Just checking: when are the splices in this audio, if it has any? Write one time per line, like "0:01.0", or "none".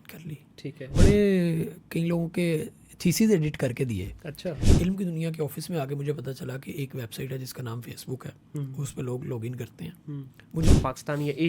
0:00.9
0:04.7
0:10.7